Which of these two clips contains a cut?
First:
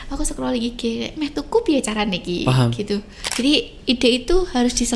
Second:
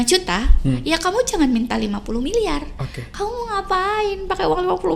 first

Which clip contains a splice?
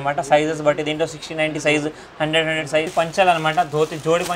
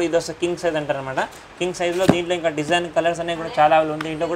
first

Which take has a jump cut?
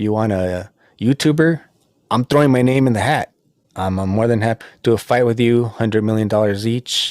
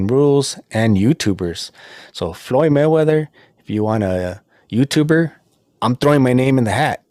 first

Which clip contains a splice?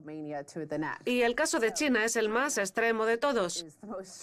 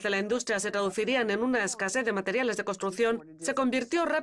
second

